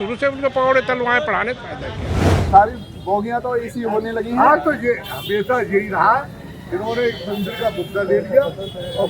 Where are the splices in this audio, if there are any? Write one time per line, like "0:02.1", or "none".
0:02.3